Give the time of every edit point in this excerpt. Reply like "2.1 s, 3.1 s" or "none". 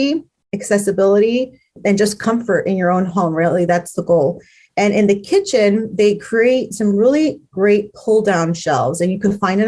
none